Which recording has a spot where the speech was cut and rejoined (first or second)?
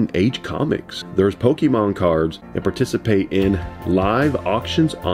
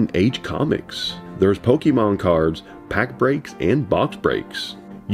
first